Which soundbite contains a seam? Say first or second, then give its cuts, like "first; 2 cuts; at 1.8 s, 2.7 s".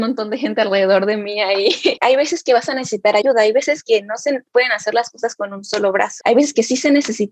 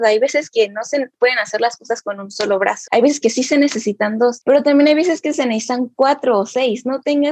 first; 1 cut; at 2.0 s